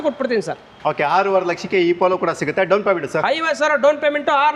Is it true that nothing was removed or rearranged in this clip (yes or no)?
yes